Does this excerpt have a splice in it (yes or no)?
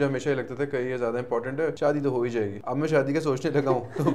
yes